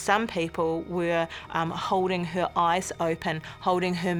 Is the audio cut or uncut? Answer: uncut